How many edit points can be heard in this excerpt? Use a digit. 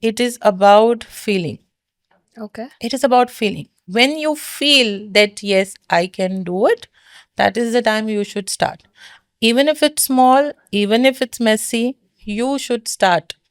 0